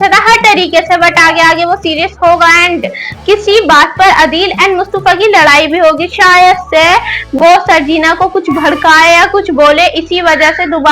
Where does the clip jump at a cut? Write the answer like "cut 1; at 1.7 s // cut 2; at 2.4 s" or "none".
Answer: none